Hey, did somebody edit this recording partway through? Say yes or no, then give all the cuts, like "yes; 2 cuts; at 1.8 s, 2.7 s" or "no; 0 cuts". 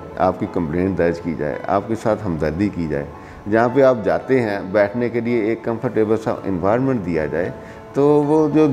no; 0 cuts